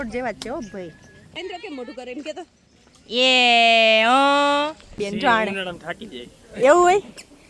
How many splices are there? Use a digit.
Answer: 2